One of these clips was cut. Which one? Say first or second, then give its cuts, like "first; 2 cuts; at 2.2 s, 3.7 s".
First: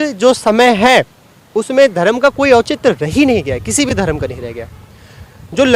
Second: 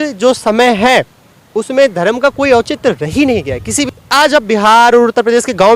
second; 1 cut; at 3.9 s